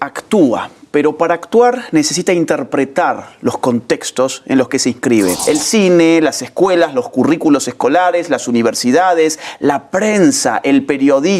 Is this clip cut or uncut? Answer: cut